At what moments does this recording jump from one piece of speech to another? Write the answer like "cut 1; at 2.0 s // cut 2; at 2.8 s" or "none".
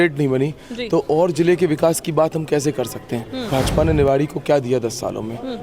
cut 1; at 3.5 s